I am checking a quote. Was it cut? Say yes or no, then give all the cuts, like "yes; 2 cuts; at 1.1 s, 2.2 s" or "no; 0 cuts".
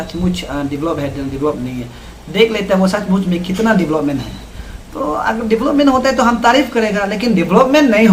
no; 0 cuts